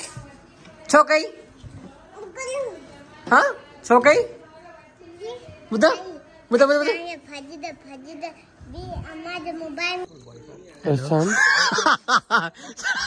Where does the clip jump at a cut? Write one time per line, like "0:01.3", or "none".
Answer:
0:10.0

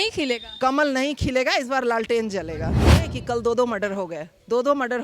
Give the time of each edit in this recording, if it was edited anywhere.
0:03.0

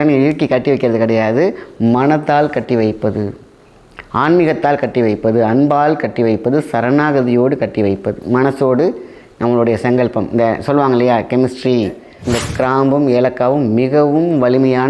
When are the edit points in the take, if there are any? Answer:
0:12.1

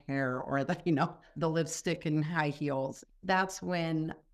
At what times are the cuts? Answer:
0:01.3
0:03.0

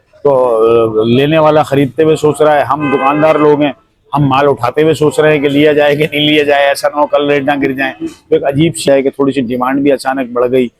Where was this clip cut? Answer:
0:08.9

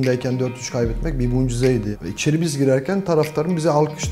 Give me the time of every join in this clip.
0:01.9

